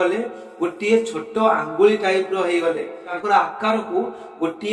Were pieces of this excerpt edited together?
yes; 1 cut; at 3.1 s

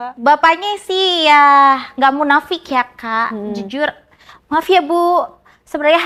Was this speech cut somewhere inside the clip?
no; 0 cuts

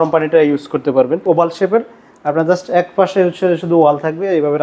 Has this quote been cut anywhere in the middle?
yes; 1 cut; at 1.2 s

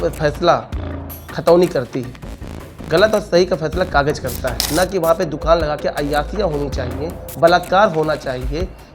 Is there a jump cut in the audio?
yes; 1 cut; at 4.5 s

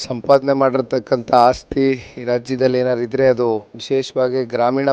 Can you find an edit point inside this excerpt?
yes; 1 cut; at 3.7 s

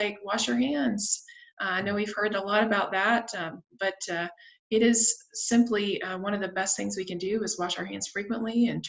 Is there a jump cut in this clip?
no; 0 cuts

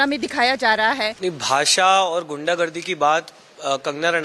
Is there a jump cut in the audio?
yes; 1 cut; at 1.1 s

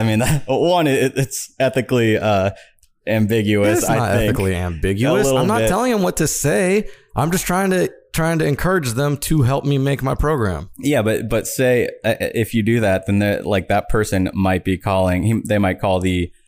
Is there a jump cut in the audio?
no; 0 cuts

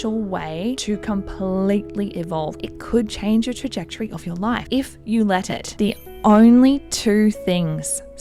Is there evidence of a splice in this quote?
yes; 3 cuts; at 2.6 s, 4.6 s, 5.7 s

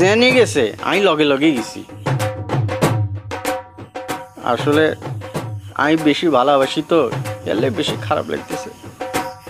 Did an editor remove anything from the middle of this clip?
no; 0 cuts

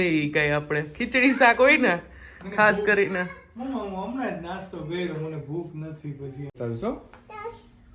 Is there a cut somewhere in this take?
yes; 1 cut; at 6.6 s

